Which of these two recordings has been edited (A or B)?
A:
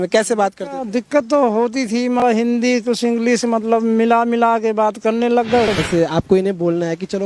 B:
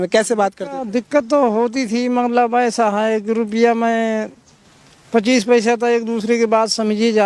A